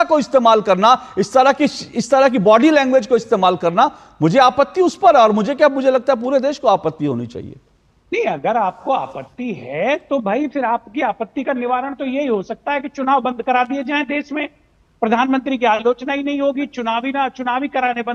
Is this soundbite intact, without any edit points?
yes; 0 cuts

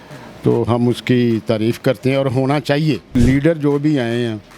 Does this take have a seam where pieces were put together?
yes; 1 cut; at 3.1 s

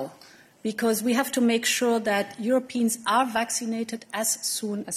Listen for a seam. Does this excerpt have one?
no; 0 cuts

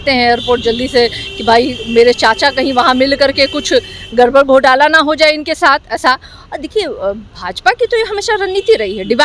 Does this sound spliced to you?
no; 0 cuts

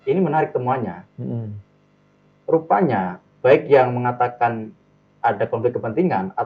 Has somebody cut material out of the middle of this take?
no; 0 cuts

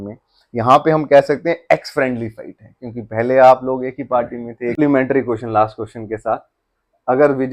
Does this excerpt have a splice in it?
yes; 1 cut; at 4.7 s

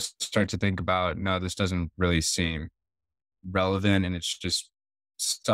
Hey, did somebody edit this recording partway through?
no; 0 cuts

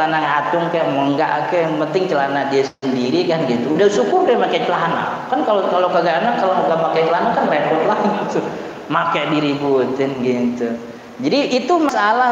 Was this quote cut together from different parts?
no; 0 cuts

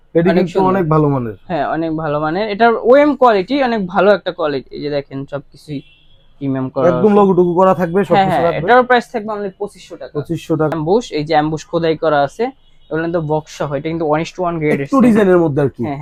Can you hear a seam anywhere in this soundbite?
no; 0 cuts

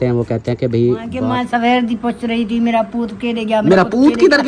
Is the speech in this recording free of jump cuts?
no; 1 cut; at 1.2 s

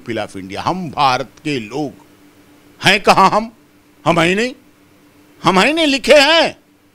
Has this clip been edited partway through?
no; 0 cuts

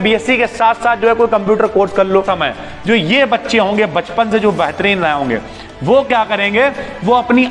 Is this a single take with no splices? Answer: no; 1 cut; at 2.3 s

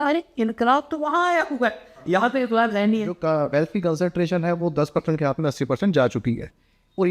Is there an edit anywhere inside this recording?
yes; 1 cut; at 3.2 s

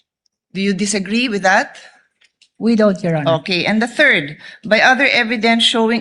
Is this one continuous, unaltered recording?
yes; 0 cuts

